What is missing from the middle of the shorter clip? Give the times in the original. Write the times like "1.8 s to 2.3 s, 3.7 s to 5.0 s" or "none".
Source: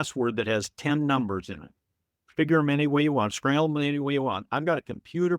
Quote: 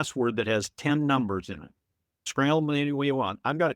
2.3 s to 3.3 s